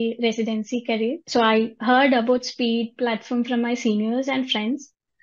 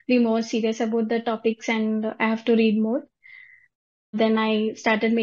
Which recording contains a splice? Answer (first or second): first